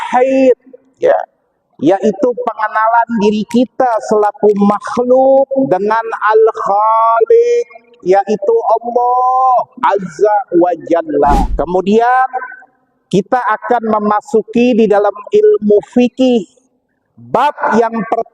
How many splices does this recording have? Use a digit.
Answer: 1